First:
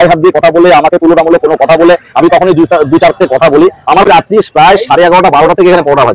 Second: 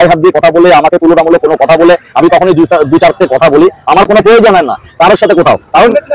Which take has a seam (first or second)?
first